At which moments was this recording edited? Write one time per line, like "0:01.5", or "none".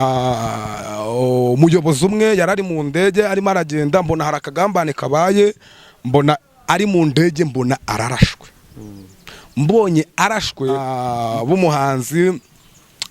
0:10.9